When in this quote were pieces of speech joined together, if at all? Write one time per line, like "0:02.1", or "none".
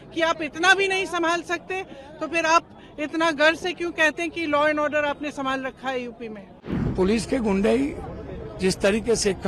0:06.8